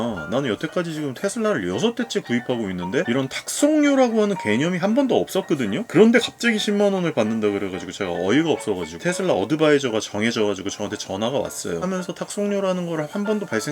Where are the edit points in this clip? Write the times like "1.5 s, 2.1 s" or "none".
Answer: 8.9 s, 11.8 s

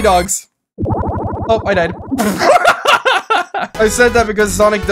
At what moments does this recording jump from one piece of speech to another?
3.7 s

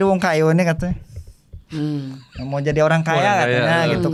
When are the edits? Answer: none

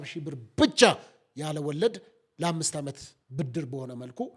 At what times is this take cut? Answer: none

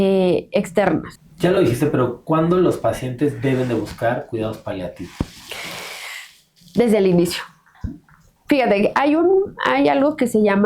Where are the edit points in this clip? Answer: 1.2 s

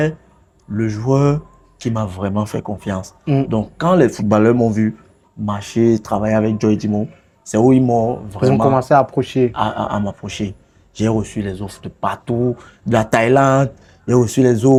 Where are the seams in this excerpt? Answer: none

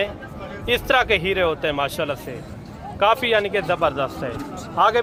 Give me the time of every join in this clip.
none

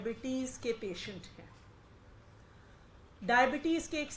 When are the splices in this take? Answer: none

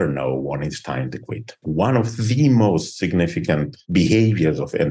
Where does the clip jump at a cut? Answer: 1.6 s

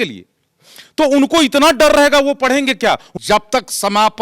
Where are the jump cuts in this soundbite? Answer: 3.1 s

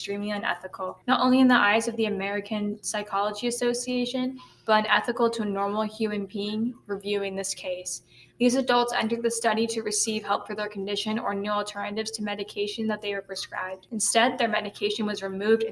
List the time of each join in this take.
1.0 s, 13.8 s

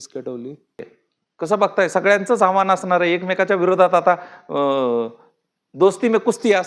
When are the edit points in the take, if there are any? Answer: 1.0 s

